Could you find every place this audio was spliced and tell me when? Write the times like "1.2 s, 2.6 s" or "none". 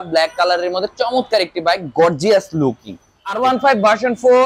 3.4 s